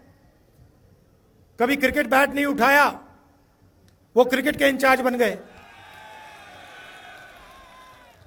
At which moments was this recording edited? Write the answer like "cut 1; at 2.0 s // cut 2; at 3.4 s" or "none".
none